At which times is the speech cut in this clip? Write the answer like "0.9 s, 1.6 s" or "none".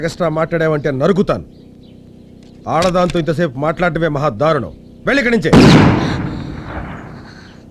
none